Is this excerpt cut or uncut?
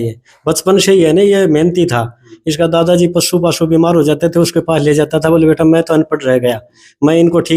uncut